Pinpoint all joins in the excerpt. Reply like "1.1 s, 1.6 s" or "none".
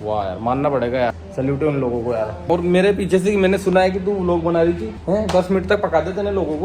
1.1 s, 2.5 s, 4.9 s